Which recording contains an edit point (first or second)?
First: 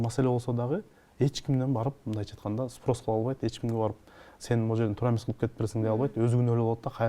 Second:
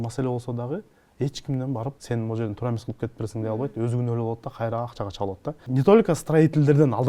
second